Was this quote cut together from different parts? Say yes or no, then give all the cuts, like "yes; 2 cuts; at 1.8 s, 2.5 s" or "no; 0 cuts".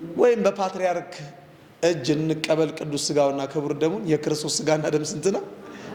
no; 0 cuts